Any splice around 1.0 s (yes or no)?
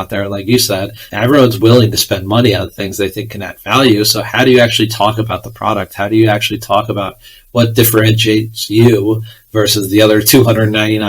yes